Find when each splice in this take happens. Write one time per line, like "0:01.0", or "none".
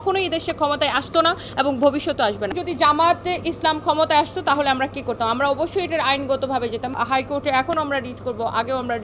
0:02.5
0:06.9